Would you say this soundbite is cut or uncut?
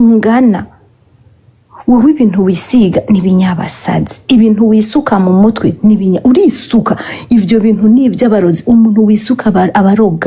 uncut